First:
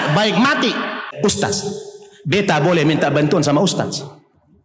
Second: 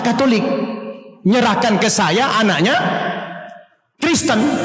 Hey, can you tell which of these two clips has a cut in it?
first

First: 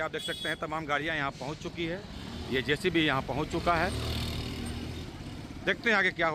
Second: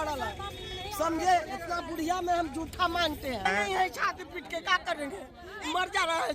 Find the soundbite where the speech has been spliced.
second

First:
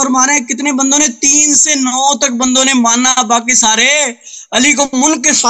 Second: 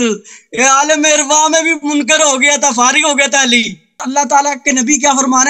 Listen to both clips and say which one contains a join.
second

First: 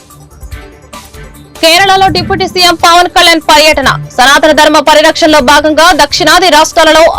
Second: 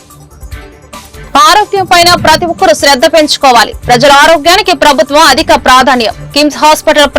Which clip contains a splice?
second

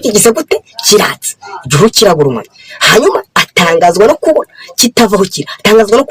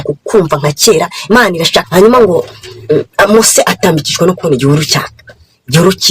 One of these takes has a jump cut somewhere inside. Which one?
second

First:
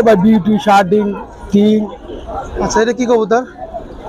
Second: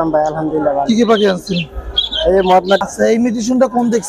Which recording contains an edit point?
second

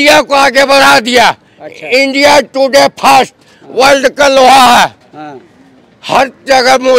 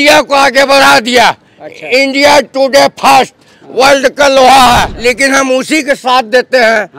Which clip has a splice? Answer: second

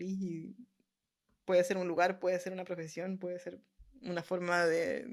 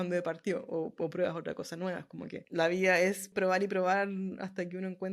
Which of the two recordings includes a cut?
second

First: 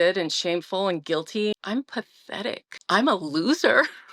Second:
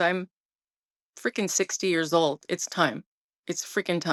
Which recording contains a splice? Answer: first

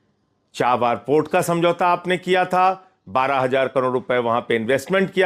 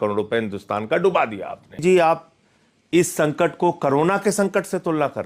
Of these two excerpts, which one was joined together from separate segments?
second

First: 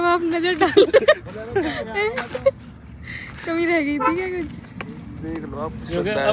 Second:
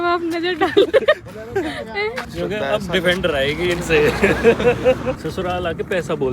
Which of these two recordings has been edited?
second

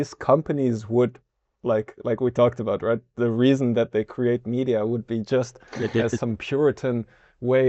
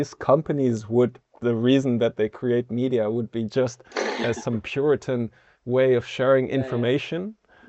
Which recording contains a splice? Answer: second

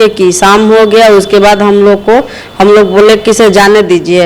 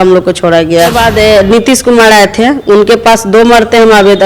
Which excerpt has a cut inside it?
second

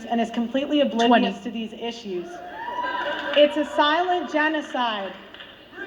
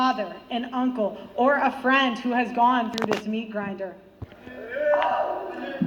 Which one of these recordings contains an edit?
first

